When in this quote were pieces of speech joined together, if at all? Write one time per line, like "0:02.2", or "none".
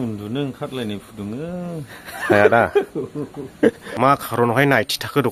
0:03.8